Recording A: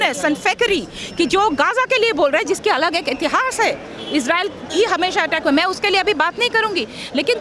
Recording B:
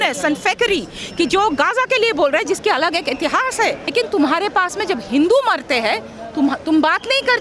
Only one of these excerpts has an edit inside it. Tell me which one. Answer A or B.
B